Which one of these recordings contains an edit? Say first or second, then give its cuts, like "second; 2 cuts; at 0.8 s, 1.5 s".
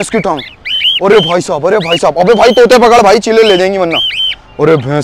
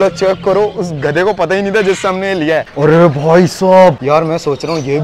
second; 2 cuts; at 2.7 s, 4.0 s